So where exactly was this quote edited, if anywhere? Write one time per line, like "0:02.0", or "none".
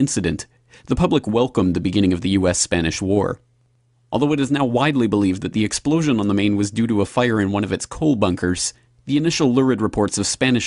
none